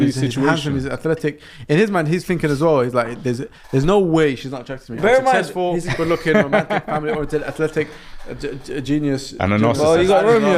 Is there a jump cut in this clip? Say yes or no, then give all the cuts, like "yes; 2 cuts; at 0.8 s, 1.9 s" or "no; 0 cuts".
no; 0 cuts